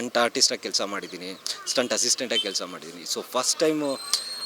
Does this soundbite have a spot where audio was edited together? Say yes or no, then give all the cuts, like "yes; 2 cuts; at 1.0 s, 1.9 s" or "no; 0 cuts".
no; 0 cuts